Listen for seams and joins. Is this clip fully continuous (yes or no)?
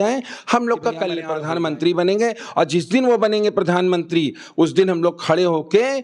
no